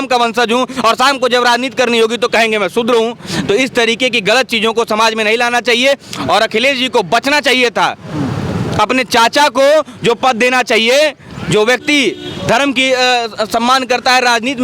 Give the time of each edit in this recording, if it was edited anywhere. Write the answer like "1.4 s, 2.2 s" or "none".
none